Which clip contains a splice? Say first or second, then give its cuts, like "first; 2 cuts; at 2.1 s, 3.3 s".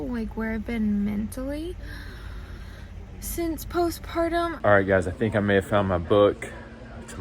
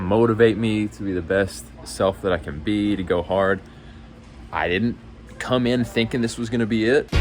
first; 1 cut; at 4.5 s